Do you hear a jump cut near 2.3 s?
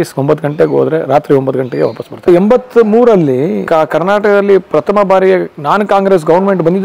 yes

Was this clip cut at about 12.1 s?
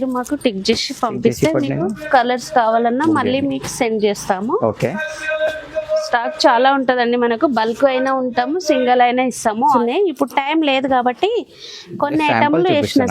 no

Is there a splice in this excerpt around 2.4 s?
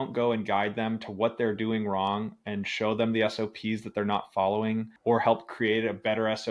no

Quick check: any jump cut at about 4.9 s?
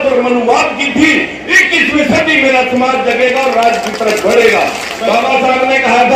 yes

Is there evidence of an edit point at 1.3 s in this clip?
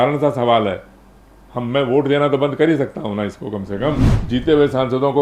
no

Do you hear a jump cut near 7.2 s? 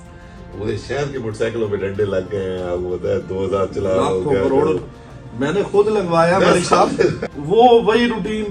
yes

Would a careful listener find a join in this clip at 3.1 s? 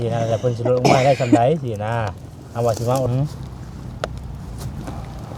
yes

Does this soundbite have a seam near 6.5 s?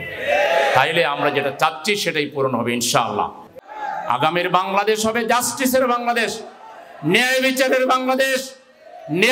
no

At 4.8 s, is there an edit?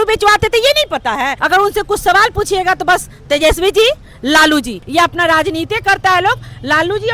yes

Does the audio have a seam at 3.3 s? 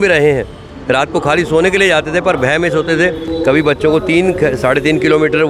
yes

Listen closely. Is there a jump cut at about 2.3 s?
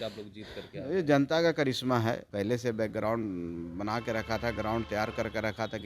yes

